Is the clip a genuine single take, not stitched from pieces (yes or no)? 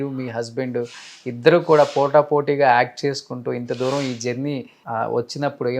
no